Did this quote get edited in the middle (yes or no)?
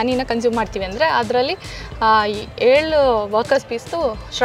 no